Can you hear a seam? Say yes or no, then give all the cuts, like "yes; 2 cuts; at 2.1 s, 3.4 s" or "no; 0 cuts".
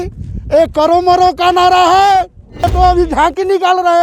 yes; 1 cut; at 2.6 s